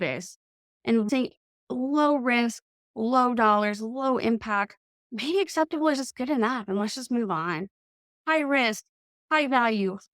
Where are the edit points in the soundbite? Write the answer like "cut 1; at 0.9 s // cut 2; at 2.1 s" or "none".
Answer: cut 1; at 1.1 s